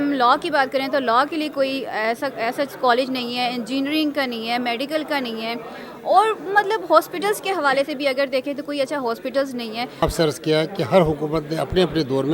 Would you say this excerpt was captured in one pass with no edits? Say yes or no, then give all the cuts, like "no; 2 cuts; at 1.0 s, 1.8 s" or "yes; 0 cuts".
no; 1 cut; at 10.0 s